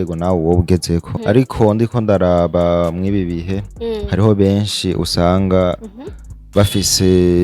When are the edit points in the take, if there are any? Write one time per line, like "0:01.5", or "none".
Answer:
0:01.1